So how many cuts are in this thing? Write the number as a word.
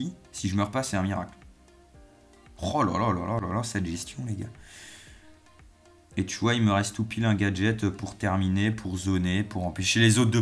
zero